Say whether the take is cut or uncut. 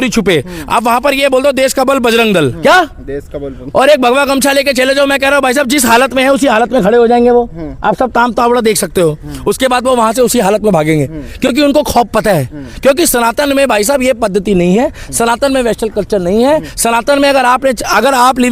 uncut